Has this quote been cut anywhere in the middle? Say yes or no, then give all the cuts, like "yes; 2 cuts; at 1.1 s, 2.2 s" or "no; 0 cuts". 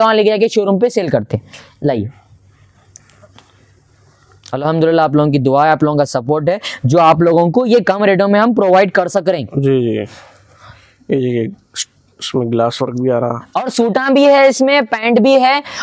no; 0 cuts